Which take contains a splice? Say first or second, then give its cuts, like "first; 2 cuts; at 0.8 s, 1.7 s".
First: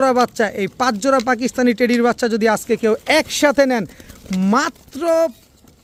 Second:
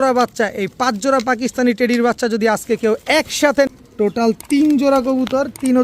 second; 1 cut; at 3.7 s